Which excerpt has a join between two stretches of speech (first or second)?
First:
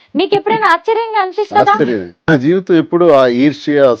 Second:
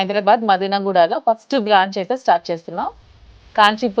first